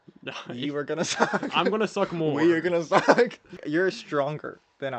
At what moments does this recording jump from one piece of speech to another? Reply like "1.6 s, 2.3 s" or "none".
3.6 s